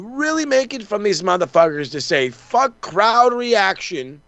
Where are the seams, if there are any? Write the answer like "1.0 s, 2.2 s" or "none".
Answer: none